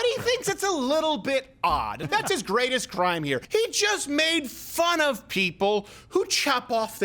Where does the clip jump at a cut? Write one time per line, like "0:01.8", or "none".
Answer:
0:02.0
0:03.4